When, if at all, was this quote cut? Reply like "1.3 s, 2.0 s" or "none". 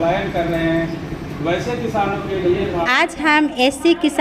2.9 s